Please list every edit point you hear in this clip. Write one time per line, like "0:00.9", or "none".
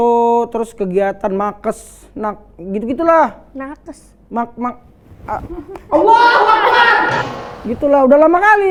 none